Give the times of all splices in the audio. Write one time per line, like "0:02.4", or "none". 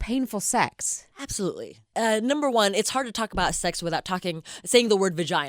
0:01.8